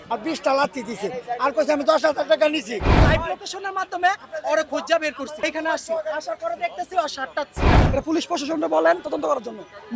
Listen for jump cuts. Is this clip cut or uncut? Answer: cut